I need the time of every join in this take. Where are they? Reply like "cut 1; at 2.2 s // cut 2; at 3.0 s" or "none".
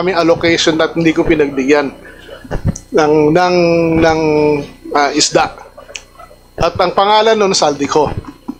none